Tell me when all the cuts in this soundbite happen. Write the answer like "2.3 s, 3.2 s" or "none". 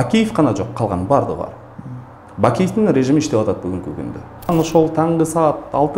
4.5 s